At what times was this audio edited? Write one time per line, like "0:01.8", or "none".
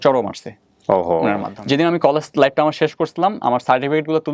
0:01.5